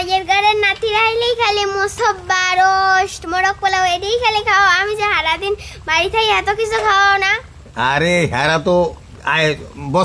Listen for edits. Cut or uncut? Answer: uncut